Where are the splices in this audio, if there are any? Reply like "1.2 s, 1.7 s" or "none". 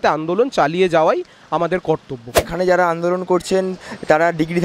2.4 s